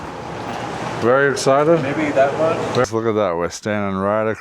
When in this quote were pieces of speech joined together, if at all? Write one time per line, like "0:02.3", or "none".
0:02.8